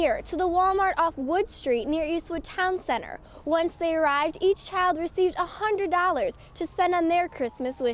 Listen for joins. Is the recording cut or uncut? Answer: uncut